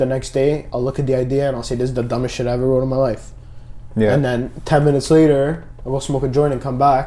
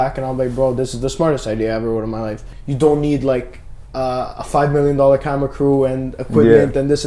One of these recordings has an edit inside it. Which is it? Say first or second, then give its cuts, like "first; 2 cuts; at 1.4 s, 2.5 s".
second; 1 cut; at 2.4 s